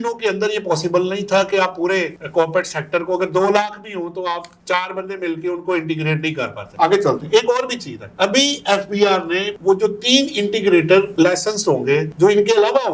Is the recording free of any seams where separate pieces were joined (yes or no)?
yes